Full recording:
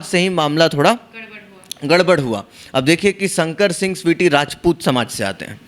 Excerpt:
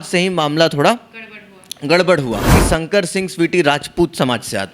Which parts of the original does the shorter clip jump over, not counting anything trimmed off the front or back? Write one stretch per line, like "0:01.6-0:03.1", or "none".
0:02.6-0:03.2